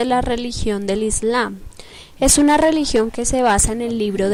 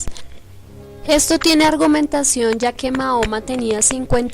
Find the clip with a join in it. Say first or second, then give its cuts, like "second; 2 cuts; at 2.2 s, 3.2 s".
second; 1 cut; at 3.0 s